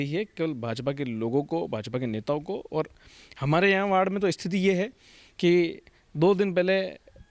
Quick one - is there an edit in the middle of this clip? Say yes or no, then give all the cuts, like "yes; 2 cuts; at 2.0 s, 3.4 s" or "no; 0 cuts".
no; 0 cuts